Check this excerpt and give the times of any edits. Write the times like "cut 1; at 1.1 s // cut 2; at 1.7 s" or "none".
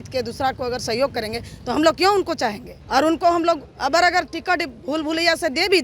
cut 1; at 2.7 s